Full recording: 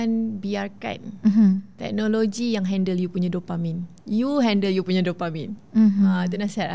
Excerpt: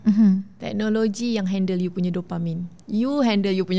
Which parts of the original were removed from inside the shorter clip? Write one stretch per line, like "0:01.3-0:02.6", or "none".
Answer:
none